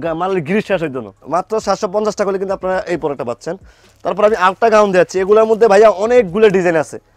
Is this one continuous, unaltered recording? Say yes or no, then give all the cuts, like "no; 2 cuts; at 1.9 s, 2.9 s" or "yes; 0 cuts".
yes; 0 cuts